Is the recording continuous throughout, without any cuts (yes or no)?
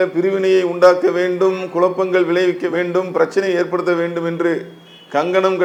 yes